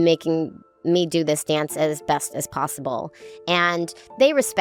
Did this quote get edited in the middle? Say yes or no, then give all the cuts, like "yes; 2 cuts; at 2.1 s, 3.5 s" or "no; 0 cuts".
no; 0 cuts